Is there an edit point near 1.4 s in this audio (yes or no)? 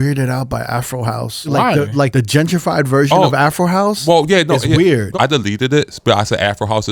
yes